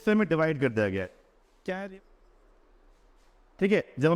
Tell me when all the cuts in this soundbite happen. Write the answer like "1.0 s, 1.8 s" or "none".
1.9 s